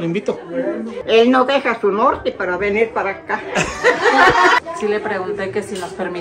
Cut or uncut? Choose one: cut